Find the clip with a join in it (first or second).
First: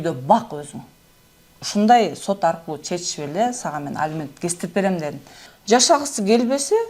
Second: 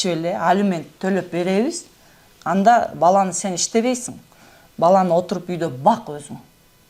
first